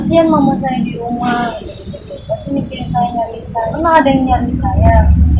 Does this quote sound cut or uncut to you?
cut